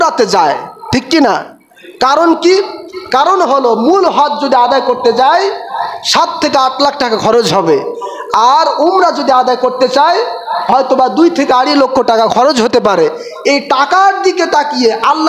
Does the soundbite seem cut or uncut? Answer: uncut